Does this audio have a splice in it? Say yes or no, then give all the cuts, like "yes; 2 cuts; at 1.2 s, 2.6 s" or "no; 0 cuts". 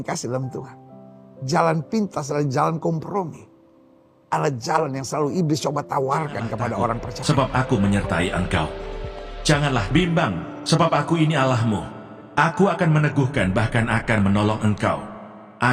yes; 1 cut; at 7.2 s